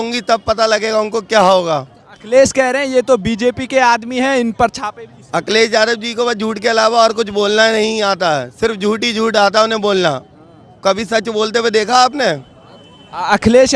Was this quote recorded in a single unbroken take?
yes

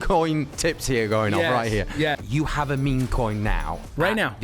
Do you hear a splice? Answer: yes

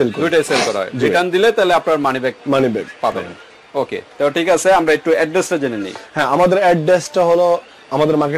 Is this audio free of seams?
yes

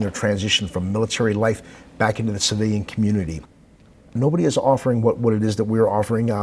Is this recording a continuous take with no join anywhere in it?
no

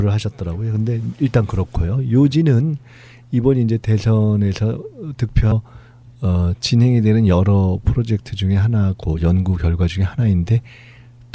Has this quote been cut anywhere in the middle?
no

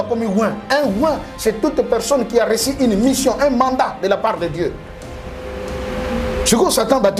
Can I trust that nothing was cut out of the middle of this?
yes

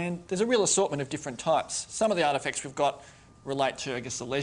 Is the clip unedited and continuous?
no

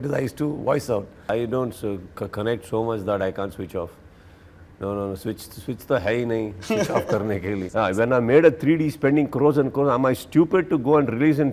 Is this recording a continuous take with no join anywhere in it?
no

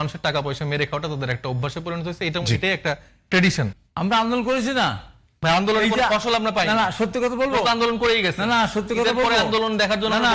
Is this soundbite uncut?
no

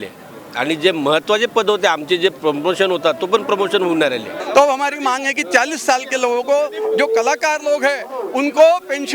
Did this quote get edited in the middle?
yes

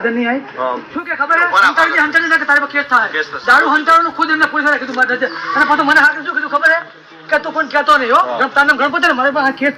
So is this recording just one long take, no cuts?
yes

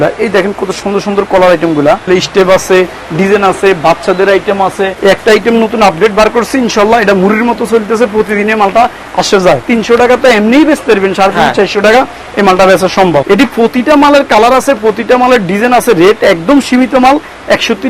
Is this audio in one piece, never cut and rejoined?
no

